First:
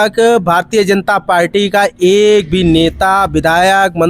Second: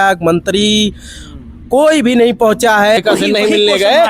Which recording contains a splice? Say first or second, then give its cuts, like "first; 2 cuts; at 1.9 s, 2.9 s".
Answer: second; 1 cut; at 3.0 s